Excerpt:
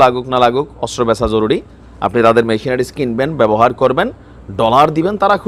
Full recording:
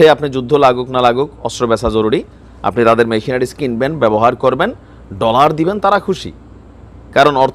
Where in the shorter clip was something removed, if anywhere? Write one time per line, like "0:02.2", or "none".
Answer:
none